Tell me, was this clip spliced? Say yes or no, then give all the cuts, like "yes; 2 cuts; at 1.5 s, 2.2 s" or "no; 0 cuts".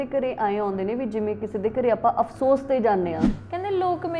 yes; 1 cut; at 3.3 s